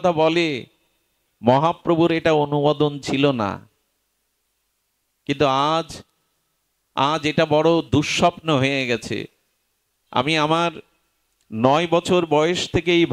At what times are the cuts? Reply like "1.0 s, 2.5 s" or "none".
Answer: none